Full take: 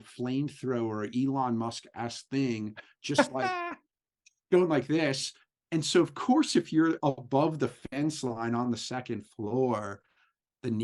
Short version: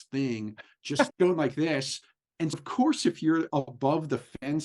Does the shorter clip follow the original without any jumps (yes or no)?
no